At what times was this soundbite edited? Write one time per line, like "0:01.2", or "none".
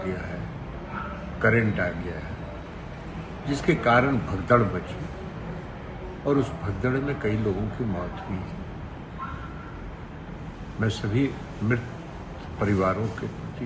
none